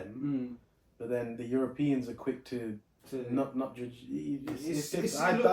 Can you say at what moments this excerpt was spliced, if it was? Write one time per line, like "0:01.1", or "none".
none